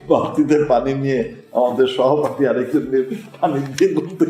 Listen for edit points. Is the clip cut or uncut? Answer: uncut